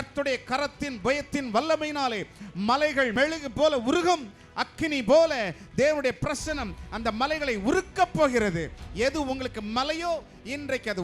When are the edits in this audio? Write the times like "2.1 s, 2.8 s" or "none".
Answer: 3.1 s